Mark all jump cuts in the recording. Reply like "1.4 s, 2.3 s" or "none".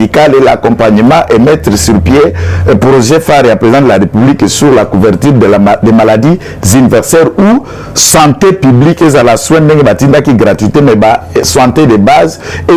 none